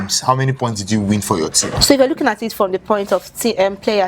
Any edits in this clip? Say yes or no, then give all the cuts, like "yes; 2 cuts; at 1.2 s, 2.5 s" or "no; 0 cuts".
no; 0 cuts